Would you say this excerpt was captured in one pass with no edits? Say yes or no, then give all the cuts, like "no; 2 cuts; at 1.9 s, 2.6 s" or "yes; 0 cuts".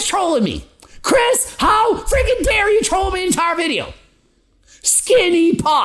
yes; 0 cuts